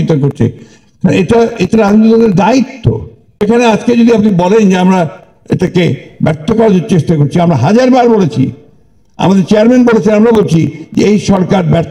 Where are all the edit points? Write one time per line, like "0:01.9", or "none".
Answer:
0:03.4